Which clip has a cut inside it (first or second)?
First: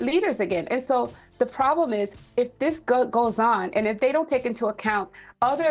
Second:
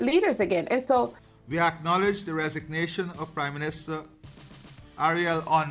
second